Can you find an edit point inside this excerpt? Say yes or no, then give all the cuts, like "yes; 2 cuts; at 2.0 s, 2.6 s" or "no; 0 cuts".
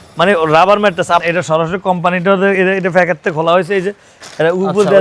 yes; 1 cut; at 1.2 s